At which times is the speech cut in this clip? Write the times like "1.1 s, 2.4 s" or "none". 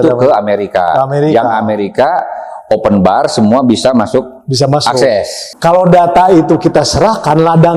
5.4 s